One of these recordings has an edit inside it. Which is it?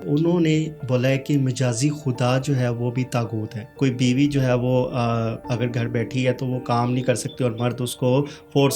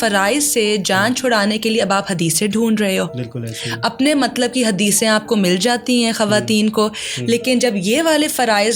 first; 1 cut; at 3.6 s

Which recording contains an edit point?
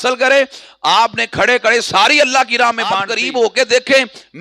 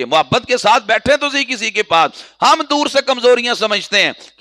first; 1 cut; at 3.1 s

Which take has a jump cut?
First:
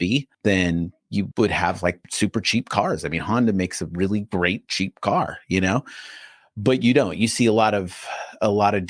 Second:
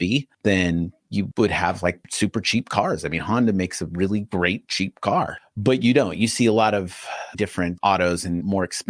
second; 2 cuts; at 5.4 s, 7.3 s

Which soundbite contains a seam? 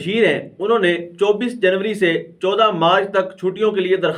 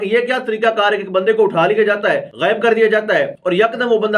second; 2 cuts; at 2.3 s, 3.4 s

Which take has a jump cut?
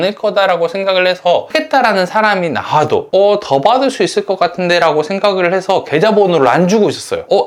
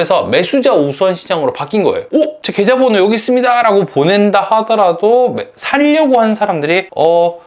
second; 1 cut; at 2.1 s

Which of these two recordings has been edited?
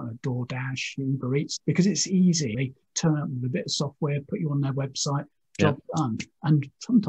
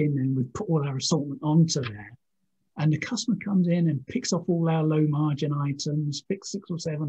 first; 2 cuts; at 1.5 s, 2.6 s

